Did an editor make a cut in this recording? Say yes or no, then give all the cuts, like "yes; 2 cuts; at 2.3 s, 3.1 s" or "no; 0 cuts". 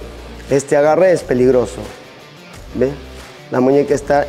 no; 0 cuts